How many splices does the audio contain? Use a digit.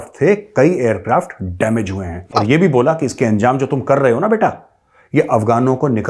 1